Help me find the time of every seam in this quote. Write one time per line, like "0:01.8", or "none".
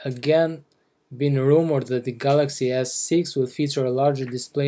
0:01.3